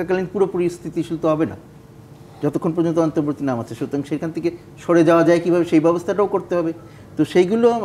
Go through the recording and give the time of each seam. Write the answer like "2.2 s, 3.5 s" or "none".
none

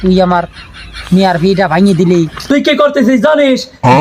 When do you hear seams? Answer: 2.4 s

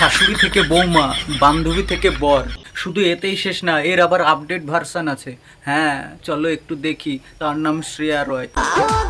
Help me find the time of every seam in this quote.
2.6 s

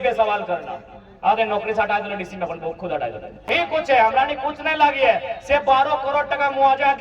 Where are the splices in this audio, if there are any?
3.5 s

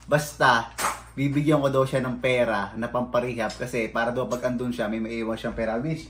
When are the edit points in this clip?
none

